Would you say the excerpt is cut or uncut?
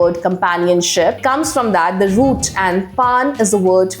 cut